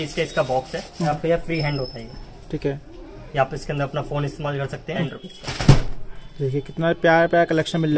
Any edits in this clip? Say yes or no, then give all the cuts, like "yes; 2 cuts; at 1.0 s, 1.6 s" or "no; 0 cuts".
yes; 2 cuts; at 1.1 s, 5.1 s